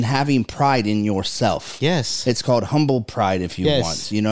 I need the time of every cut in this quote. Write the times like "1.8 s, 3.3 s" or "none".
none